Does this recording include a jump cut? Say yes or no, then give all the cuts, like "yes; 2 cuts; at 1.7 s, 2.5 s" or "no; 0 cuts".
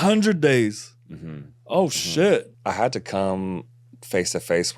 yes; 1 cut; at 2.5 s